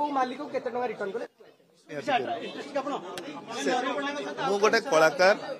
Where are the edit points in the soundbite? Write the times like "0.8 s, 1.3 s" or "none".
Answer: 1.9 s